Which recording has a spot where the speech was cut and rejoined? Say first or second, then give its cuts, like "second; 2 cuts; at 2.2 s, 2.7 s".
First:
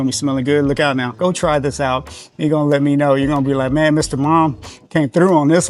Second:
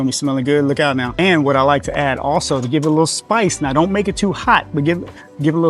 first; 1 cut; at 1.1 s